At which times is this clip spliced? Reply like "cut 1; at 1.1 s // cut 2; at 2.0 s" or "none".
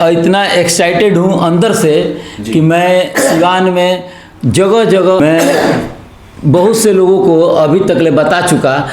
cut 1; at 5.2 s